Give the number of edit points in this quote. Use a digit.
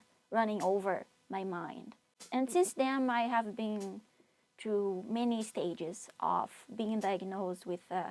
1